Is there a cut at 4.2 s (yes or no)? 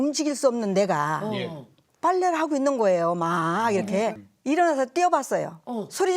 yes